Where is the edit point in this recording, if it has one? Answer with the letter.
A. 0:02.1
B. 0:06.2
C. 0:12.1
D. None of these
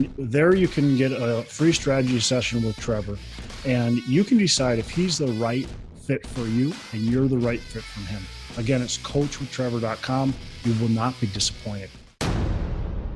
C